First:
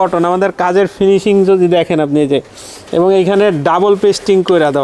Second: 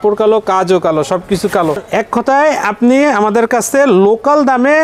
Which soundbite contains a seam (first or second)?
second